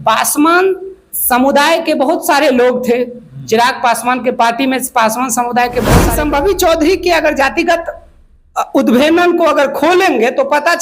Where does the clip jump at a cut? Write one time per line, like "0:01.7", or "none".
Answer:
0:06.0